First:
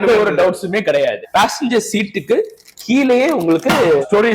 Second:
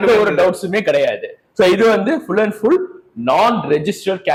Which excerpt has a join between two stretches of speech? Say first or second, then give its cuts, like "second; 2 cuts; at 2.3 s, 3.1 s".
first; 1 cut; at 1.2 s